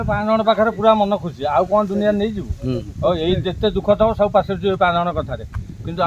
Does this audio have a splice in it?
no; 0 cuts

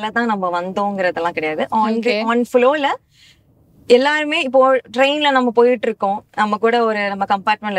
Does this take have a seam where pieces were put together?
no; 0 cuts

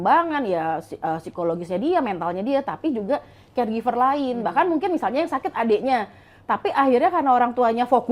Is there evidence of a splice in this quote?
no; 0 cuts

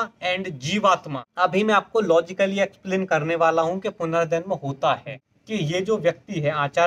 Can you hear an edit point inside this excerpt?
yes; 2 cuts; at 1.2 s, 5.3 s

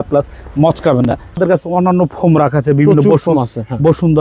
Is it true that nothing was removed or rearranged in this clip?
no; 1 cut; at 1.4 s

